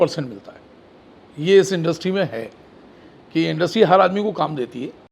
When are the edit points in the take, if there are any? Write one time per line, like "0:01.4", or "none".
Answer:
none